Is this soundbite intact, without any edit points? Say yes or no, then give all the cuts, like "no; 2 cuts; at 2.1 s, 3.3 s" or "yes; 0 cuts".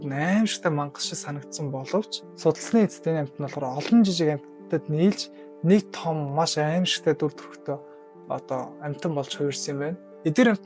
yes; 0 cuts